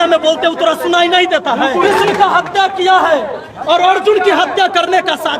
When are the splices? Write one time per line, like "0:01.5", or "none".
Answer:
0:01.8